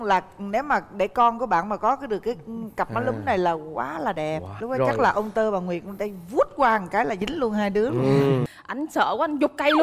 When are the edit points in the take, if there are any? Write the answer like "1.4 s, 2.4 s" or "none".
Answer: 8.5 s